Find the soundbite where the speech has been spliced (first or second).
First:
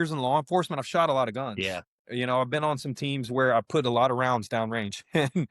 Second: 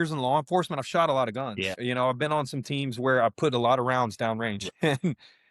second